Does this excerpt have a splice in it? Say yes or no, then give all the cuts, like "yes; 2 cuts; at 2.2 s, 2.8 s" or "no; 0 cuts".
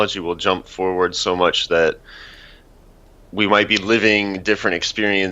yes; 1 cut; at 0.9 s